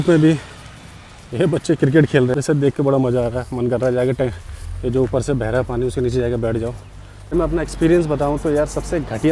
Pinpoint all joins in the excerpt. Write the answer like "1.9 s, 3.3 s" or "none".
2.3 s, 7.3 s